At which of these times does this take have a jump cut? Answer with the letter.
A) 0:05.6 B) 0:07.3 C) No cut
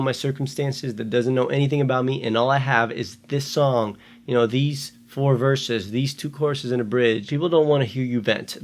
B